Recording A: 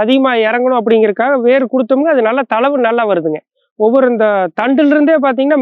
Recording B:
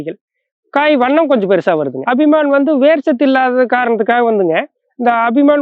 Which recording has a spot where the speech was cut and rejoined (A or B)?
B